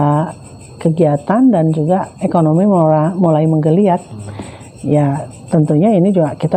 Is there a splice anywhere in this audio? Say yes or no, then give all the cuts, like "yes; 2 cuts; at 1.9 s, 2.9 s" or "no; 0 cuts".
no; 0 cuts